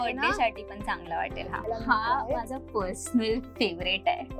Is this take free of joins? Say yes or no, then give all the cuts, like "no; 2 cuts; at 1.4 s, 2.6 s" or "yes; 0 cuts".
no; 1 cut; at 1.6 s